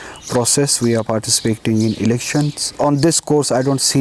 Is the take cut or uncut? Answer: cut